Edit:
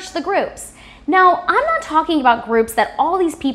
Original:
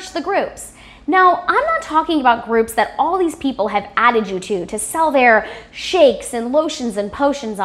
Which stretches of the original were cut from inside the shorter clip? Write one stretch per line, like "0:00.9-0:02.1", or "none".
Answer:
none